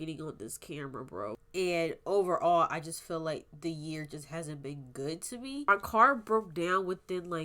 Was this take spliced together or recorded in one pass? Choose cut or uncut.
cut